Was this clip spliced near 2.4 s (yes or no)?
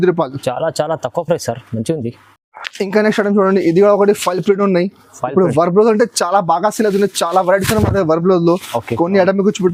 no